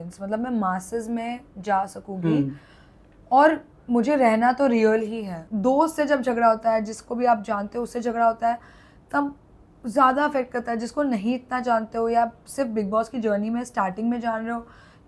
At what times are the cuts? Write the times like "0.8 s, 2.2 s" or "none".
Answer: 5.4 s

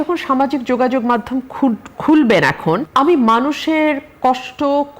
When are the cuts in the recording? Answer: 2.9 s

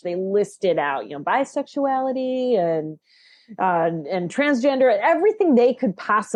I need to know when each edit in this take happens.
none

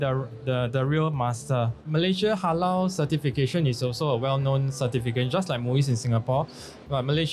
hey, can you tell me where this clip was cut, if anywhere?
1.8 s

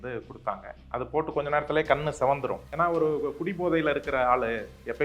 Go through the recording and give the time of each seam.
2.6 s

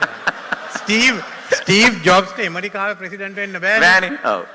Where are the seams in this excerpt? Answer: none

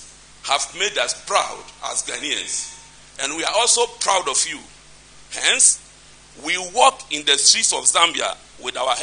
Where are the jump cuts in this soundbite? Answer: none

